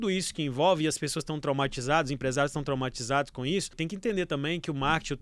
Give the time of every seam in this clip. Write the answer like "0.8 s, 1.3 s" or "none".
3.8 s